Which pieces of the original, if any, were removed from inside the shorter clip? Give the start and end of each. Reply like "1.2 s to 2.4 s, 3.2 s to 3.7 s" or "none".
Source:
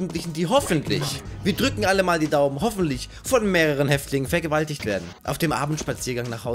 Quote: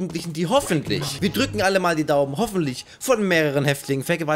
1.1 s to 1.3 s